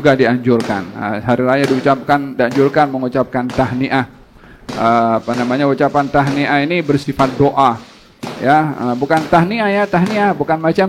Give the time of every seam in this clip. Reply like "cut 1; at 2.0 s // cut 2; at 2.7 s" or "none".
none